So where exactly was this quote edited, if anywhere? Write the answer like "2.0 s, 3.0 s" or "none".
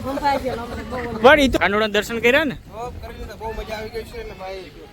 1.5 s